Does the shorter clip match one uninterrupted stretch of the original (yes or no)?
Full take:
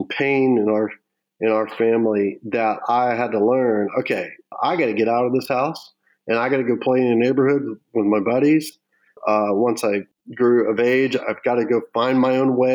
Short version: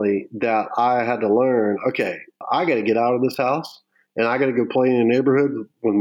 yes